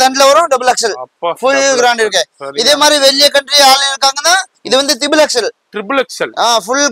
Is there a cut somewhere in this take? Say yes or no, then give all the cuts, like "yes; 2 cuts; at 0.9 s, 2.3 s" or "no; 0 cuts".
no; 0 cuts